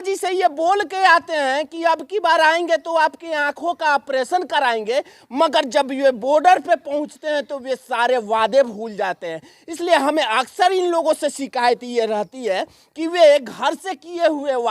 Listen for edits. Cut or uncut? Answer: uncut